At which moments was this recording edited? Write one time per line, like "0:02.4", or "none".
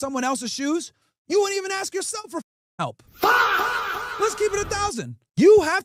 none